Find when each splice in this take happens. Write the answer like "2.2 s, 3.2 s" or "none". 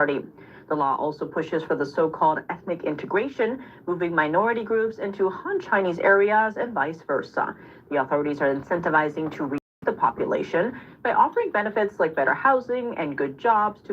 9.8 s